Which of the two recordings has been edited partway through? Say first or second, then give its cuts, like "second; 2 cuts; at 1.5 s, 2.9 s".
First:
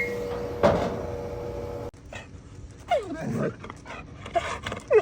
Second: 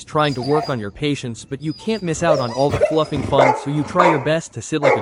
first; 1 cut; at 2.0 s